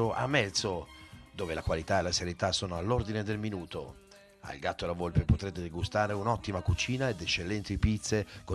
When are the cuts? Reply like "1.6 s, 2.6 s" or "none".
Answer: none